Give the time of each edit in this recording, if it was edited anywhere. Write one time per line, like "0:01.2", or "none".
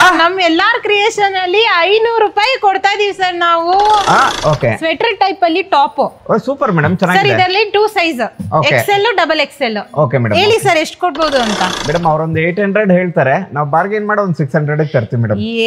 0:04.3